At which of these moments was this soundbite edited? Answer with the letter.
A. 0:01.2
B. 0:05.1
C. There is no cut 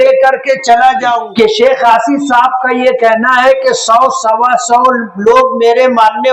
A